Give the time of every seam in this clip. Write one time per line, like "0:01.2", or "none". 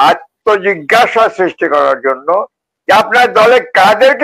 none